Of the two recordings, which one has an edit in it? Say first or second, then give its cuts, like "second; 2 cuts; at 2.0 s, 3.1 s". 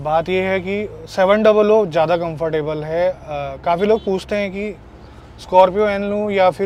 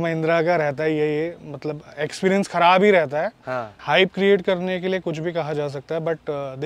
second; 1 cut; at 3.7 s